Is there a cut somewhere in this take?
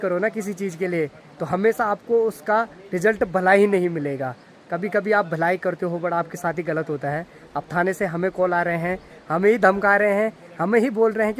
no; 0 cuts

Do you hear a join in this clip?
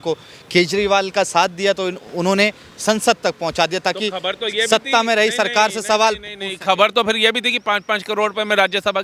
no; 0 cuts

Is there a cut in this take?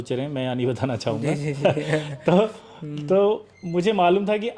no; 0 cuts

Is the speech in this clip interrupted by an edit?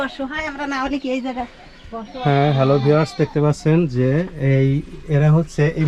no; 0 cuts

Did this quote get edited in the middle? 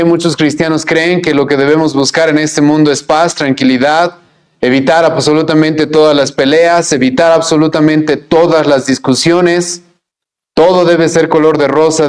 no; 0 cuts

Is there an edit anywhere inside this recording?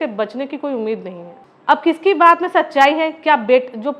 no; 0 cuts

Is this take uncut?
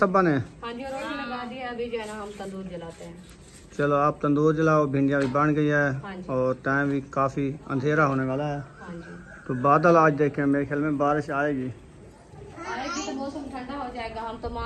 yes; 0 cuts

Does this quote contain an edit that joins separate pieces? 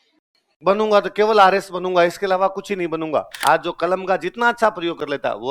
yes; 1 cut; at 3.3 s

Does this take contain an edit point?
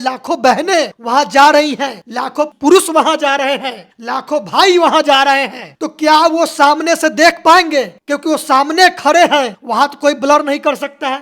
yes; 1 cut; at 2.5 s

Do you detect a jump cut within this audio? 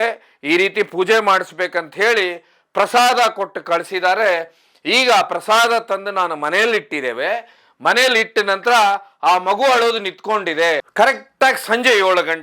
yes; 1 cut; at 10.9 s

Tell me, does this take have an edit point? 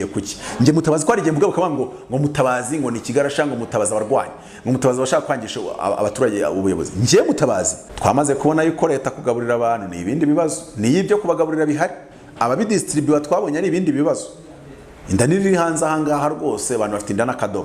yes; 1 cut; at 7.8 s

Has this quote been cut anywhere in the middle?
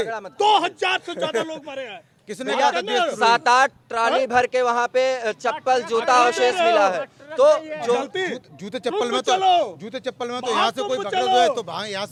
no; 0 cuts

